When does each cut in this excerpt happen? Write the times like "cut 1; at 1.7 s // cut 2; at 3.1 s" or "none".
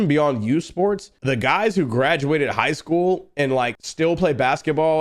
cut 1; at 1.1 s // cut 2; at 3.8 s